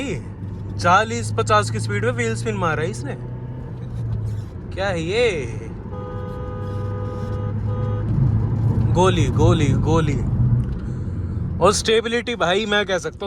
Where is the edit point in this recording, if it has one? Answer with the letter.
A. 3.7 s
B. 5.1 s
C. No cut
C